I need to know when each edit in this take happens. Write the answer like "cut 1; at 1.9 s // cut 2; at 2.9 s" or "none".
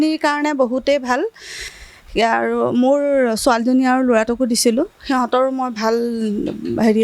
none